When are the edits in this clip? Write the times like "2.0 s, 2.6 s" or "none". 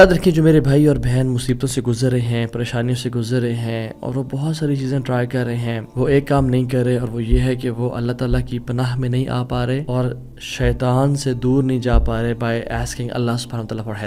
none